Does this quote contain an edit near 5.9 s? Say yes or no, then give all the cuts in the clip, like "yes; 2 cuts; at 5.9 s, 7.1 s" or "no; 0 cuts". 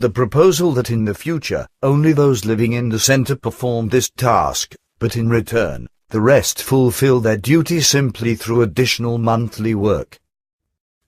no; 1 cut; at 10.2 s